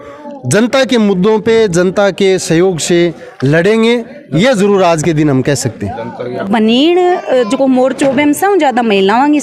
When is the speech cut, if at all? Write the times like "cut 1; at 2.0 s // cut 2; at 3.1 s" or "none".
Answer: cut 1; at 6.5 s

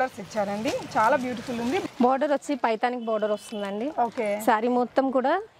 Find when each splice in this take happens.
cut 1; at 1.8 s

